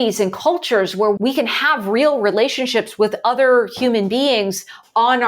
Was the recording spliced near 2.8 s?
no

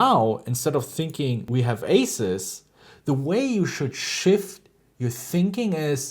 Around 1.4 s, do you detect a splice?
yes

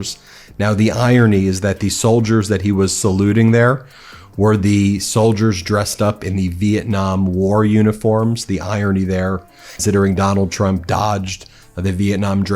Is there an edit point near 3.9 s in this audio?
yes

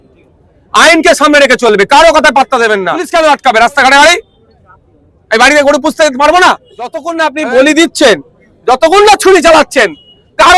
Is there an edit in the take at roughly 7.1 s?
yes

